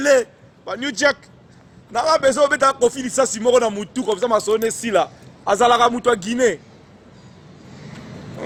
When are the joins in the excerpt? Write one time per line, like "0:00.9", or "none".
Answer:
none